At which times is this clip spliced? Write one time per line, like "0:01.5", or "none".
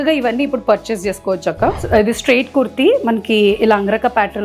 0:01.8